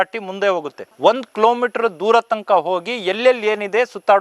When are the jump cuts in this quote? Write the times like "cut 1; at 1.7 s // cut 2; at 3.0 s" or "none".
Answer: none